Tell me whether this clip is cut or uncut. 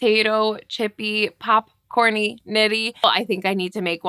cut